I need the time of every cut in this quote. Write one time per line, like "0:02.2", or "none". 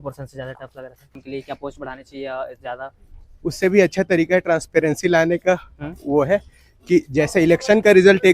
0:01.2